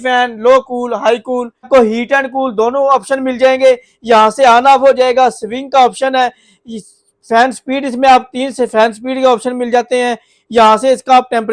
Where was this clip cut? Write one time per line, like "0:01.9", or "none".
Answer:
0:01.7